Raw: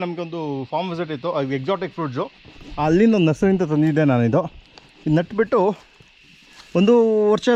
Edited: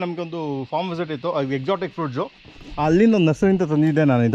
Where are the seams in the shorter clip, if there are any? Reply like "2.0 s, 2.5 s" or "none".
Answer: none